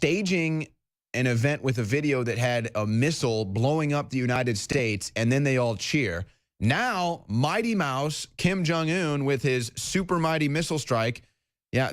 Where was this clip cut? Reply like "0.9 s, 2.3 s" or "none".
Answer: 7.5 s